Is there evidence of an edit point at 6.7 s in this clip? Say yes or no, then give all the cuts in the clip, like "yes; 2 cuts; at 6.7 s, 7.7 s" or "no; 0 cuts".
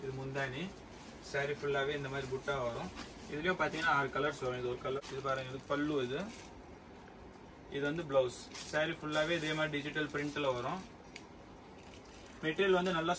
no; 1 cut; at 5.0 s